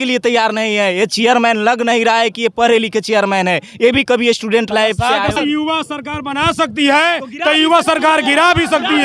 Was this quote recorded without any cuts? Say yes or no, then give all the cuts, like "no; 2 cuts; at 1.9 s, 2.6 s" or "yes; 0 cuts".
no; 1 cut; at 5.3 s